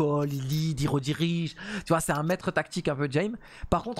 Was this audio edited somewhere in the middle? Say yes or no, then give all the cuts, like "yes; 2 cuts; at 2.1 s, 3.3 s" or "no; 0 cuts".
no; 0 cuts